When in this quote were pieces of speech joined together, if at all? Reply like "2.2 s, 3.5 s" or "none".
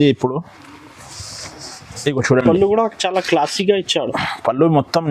none